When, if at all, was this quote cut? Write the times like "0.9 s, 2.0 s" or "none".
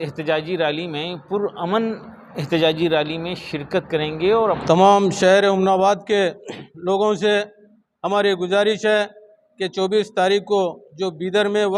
4.6 s

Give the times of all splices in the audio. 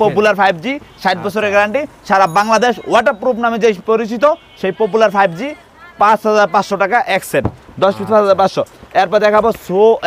none

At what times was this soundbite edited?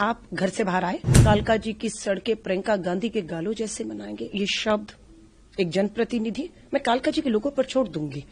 1.1 s

